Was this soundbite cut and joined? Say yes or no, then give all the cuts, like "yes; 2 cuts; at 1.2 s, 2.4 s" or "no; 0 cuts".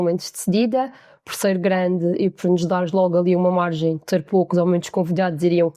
no; 0 cuts